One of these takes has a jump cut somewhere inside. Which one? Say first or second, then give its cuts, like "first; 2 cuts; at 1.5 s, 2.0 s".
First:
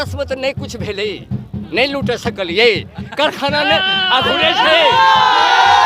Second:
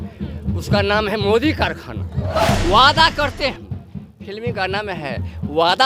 second; 1 cut; at 2.4 s